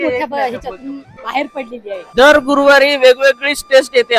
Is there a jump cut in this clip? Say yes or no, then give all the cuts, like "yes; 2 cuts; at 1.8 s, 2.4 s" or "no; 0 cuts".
yes; 2 cuts; at 1.2 s, 2.1 s